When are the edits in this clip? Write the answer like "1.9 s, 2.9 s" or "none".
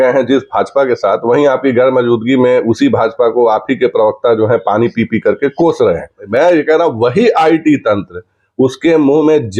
6.2 s